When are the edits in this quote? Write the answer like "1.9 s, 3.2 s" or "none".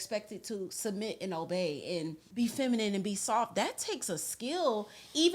2.2 s